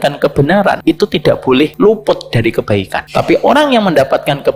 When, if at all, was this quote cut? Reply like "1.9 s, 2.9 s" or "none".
0.8 s, 1.7 s, 3.0 s